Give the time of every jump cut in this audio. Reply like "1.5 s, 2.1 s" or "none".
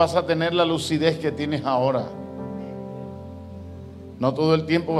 none